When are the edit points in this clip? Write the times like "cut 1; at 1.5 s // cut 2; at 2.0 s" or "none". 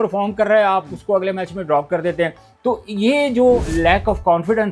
cut 1; at 3.7 s